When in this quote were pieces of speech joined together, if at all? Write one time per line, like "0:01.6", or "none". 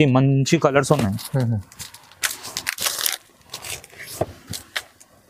none